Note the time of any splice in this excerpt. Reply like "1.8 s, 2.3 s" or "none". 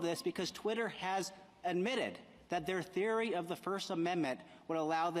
3.5 s